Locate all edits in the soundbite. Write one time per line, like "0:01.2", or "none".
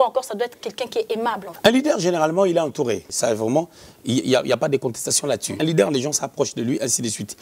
0:01.5
0:03.1
0:05.6